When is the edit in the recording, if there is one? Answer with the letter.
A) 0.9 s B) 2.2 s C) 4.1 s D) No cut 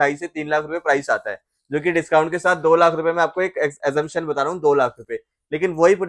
D